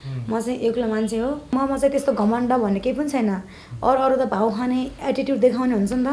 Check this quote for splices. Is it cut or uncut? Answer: cut